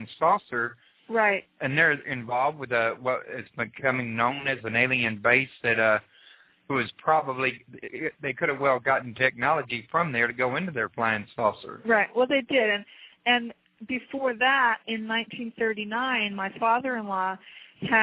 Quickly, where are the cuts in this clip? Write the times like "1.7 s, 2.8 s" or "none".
10.7 s